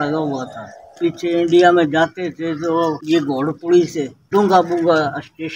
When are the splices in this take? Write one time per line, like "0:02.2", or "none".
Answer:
0:00.9
0:03.0
0:04.2